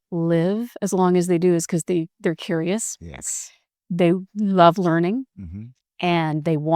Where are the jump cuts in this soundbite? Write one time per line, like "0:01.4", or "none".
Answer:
none